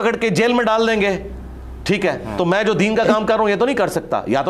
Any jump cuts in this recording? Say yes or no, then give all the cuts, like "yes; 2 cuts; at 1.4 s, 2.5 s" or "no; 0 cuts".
no; 0 cuts